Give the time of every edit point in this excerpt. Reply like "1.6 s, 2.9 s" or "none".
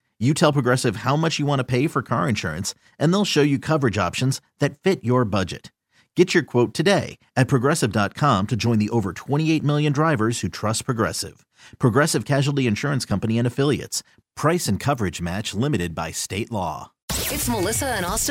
17.0 s